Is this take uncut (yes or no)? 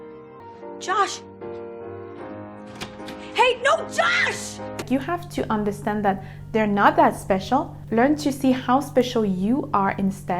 no